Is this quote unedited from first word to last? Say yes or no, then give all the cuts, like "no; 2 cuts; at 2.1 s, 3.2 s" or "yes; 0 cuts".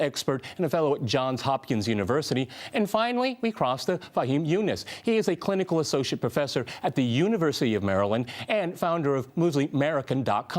no; 1 cut; at 4.6 s